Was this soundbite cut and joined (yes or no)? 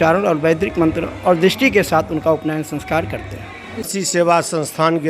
yes